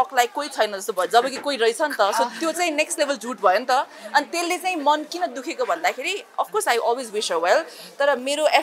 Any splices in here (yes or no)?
no